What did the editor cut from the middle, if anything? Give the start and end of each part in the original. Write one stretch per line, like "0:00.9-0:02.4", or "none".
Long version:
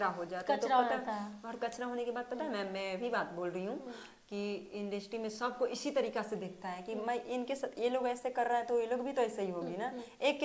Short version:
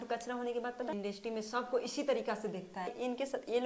0:02.4-0:04.8
0:06.8-0:07.2